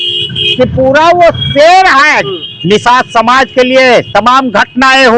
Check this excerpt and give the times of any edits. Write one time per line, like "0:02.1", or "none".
0:02.2